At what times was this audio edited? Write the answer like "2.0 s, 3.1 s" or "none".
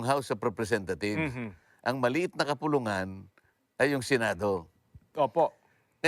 none